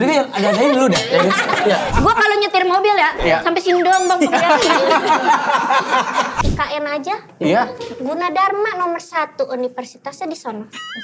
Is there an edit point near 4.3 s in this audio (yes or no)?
no